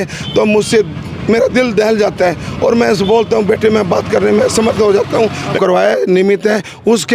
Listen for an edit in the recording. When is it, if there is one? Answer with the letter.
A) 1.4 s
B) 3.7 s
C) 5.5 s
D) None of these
C